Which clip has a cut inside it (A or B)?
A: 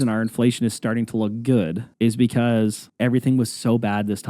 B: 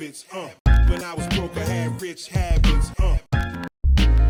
A